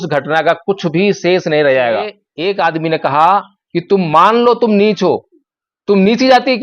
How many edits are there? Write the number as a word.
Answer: one